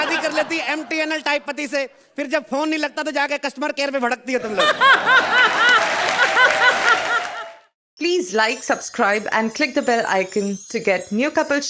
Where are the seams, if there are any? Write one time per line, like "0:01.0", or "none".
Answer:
0:07.3